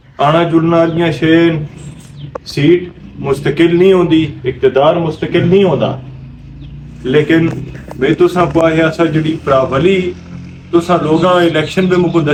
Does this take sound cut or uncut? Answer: uncut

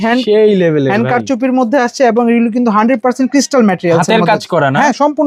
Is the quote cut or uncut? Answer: uncut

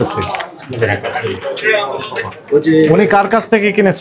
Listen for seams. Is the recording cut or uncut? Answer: uncut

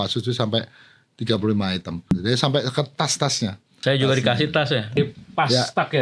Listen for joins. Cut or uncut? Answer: cut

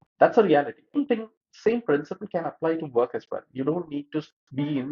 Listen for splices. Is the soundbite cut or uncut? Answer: cut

